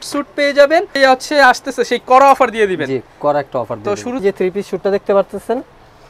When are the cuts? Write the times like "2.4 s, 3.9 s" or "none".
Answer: 0.9 s, 4.2 s

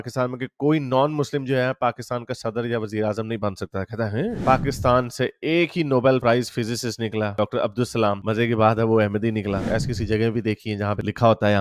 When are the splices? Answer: 4.4 s, 9.6 s

